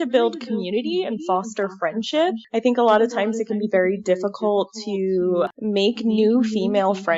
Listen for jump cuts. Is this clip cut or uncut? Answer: cut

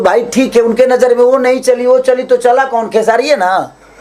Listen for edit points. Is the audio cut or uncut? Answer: uncut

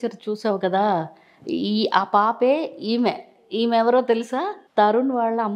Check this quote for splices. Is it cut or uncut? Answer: cut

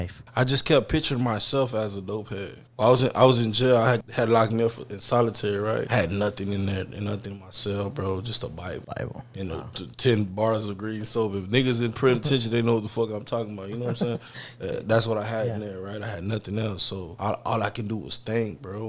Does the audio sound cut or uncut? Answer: uncut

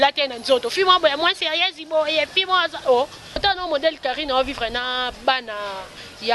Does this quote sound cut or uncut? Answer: cut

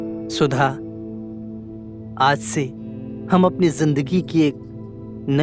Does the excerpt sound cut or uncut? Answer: uncut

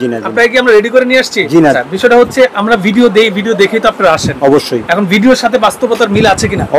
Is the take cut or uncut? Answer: cut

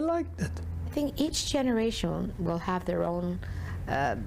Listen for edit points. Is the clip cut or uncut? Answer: cut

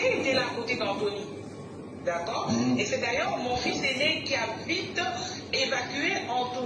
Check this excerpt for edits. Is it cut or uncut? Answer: uncut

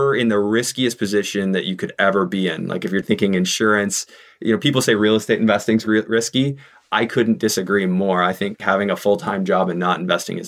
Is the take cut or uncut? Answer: cut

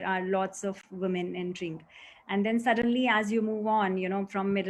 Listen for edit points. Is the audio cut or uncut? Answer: uncut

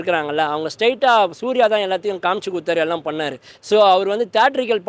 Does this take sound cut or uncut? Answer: uncut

